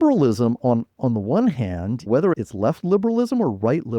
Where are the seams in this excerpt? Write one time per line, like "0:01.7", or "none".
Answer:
0:02.2